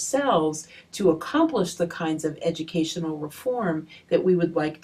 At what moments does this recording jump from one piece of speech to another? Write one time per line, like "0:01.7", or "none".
0:02.8